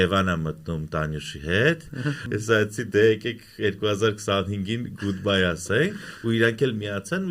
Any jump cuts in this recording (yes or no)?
yes